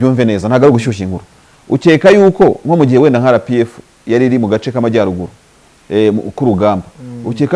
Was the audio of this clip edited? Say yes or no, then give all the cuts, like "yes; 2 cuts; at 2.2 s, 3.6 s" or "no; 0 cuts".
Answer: no; 0 cuts